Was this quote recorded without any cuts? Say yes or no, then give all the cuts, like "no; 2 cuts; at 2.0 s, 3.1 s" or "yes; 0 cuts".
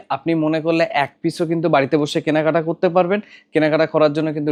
yes; 0 cuts